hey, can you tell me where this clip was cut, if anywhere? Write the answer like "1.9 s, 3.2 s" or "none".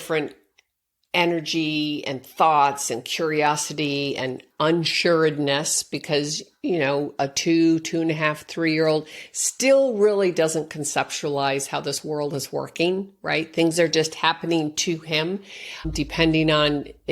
none